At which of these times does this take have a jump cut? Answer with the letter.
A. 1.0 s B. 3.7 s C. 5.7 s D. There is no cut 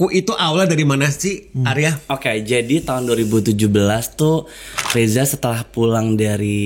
D